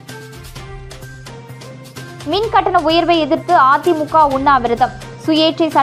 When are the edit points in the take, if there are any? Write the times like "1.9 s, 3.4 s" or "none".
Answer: 1.3 s